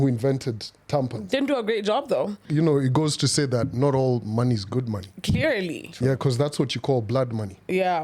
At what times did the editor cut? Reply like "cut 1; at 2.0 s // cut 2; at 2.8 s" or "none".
cut 1; at 2.4 s